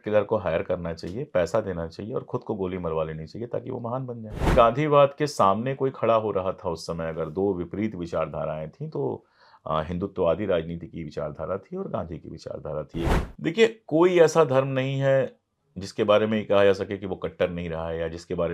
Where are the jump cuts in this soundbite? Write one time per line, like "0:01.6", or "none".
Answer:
0:04.5
0:13.1